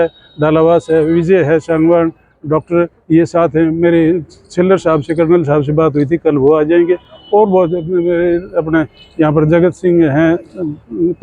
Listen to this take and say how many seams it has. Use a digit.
0